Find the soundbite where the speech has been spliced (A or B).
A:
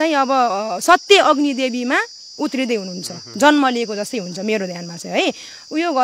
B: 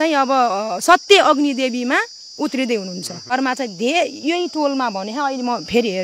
B